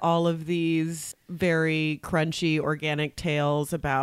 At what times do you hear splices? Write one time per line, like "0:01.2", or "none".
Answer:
0:01.1